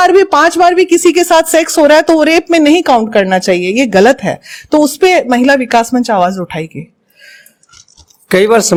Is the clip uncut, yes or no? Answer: yes